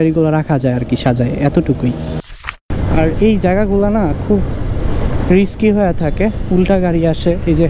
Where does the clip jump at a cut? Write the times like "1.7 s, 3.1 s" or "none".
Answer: 2.7 s